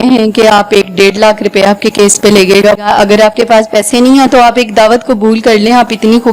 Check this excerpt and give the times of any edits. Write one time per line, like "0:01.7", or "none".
0:02.8